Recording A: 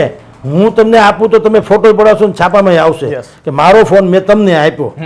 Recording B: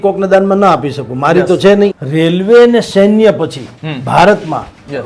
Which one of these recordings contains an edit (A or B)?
B